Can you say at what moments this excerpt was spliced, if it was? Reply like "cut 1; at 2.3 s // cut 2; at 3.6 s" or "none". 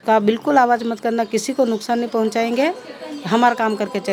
none